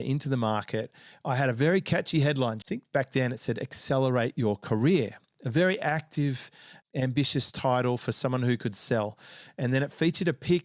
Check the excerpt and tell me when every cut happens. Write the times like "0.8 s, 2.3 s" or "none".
2.6 s